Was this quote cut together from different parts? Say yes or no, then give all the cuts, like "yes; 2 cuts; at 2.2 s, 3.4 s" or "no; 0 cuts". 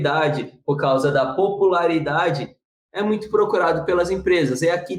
no; 0 cuts